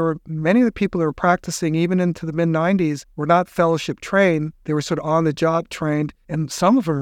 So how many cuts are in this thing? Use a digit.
2